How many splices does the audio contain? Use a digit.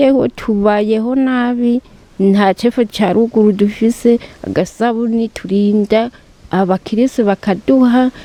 0